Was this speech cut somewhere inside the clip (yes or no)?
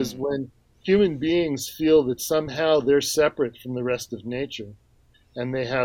no